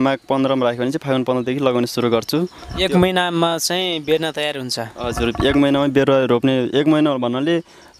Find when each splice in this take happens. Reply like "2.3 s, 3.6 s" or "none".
none